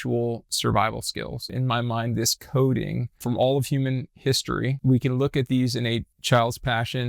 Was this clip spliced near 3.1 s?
yes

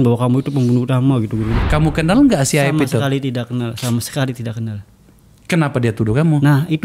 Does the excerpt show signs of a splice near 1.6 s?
yes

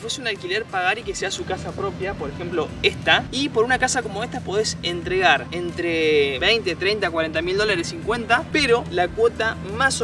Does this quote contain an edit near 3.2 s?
yes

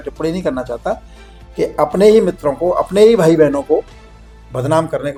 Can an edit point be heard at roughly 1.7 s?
no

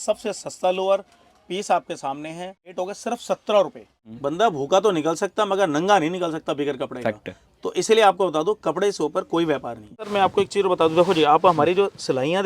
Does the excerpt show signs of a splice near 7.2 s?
no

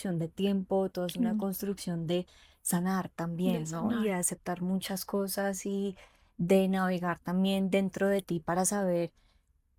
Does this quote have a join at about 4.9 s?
no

